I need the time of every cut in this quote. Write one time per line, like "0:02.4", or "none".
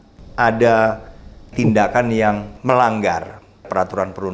0:01.5
0:02.5